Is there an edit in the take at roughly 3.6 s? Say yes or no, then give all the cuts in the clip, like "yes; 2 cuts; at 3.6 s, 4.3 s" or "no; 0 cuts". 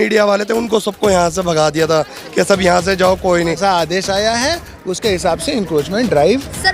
yes; 1 cut; at 3.6 s